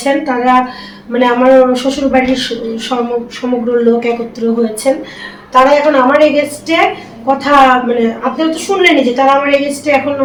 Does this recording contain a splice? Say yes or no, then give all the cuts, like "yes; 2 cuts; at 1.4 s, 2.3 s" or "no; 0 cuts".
no; 0 cuts